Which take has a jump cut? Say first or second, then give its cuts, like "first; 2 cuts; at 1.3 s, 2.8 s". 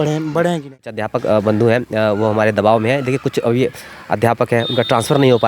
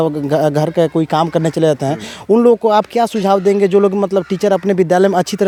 first; 1 cut; at 1.0 s